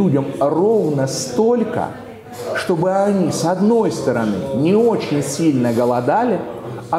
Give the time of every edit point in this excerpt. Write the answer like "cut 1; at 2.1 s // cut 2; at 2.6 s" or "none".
none